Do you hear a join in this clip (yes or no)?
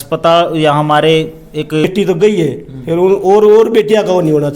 yes